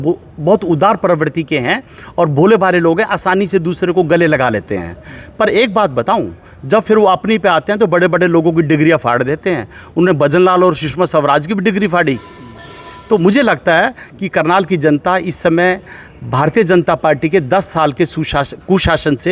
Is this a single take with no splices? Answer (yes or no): yes